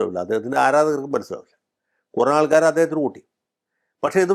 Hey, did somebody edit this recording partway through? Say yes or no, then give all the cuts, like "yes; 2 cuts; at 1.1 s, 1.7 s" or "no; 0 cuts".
no; 0 cuts